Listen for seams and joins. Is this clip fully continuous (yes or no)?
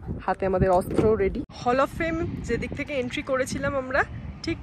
no